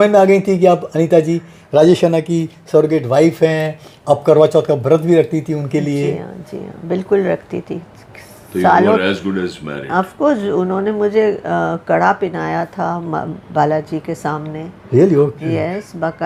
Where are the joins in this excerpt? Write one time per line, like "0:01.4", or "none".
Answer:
none

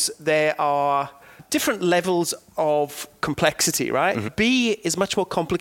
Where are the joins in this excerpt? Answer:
0:01.4
0:04.3

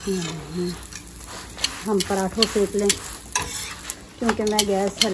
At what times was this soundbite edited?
none

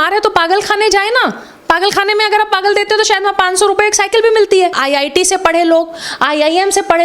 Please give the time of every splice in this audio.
0:04.8

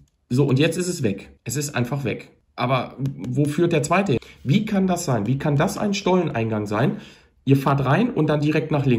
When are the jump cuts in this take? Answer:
0:01.3
0:02.4
0:04.2

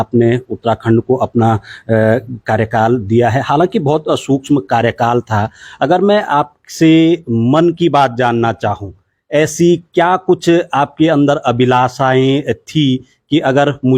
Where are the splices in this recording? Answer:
none

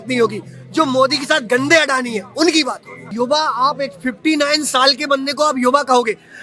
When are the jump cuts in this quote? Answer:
0:03.1

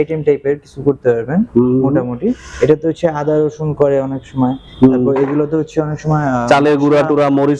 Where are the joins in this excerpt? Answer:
none

